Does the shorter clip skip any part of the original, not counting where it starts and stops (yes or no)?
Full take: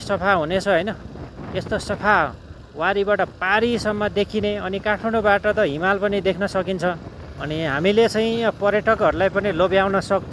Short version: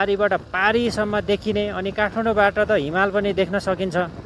no